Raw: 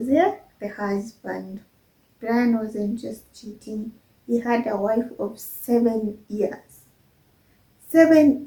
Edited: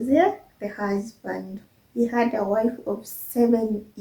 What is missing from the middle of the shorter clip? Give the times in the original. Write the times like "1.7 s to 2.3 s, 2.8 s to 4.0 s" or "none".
1.7 s to 4.1 s